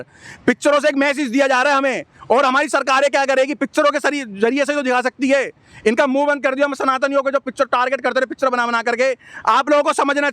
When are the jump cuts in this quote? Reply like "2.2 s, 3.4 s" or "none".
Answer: none